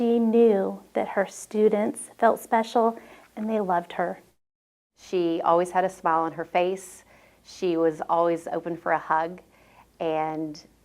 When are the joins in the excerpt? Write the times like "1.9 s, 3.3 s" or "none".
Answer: 4.3 s